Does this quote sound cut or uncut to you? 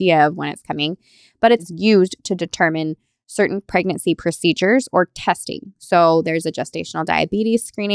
cut